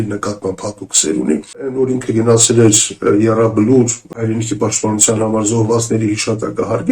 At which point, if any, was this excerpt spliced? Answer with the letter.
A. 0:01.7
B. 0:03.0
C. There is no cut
A